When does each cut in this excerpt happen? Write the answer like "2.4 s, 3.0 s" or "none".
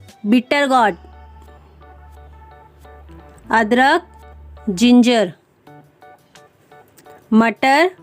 1.1 s, 3.4 s